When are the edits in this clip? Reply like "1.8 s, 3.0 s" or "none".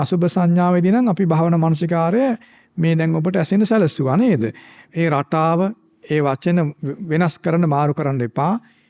4.8 s